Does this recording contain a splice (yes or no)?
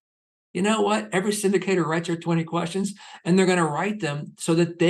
no